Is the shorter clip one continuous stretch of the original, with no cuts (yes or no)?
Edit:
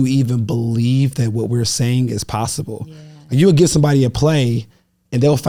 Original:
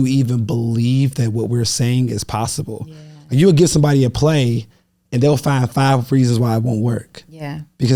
yes